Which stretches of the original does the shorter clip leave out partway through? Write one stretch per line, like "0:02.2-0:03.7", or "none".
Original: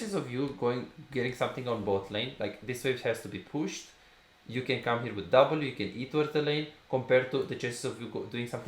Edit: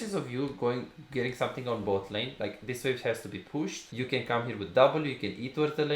0:03.8-0:04.4